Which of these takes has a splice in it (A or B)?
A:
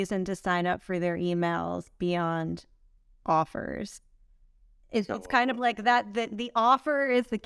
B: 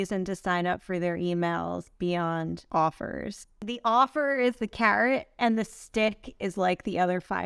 B